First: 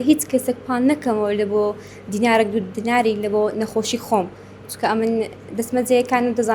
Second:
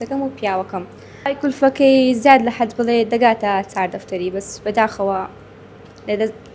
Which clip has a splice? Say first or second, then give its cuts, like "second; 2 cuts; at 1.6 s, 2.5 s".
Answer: second; 1 cut; at 1.3 s